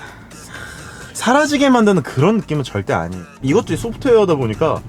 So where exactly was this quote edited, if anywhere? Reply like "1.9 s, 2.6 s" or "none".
1.1 s, 3.3 s